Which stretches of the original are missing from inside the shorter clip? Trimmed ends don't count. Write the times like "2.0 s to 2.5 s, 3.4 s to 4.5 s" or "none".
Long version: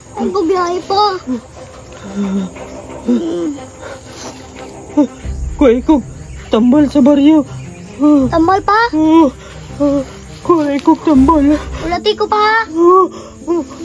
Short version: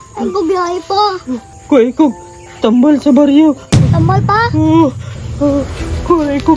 1.5 s to 5.4 s, 7.9 s to 8.4 s